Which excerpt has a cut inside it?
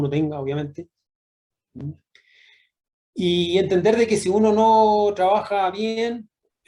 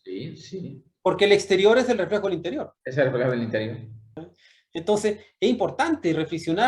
second; 1 cut; at 4.2 s

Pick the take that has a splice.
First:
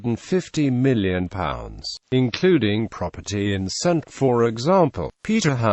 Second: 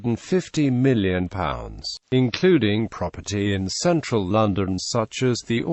second; 1 cut; at 4.1 s

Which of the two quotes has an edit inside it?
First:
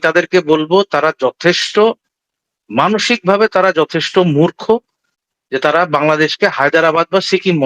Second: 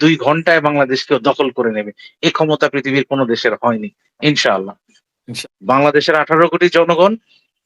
second; 1 cut; at 5.2 s

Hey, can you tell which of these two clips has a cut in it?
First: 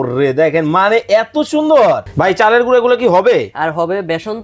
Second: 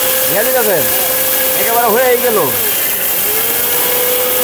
first; 1 cut; at 2.1 s

